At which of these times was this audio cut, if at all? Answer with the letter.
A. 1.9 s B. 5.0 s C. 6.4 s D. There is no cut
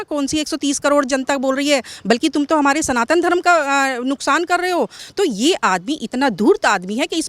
B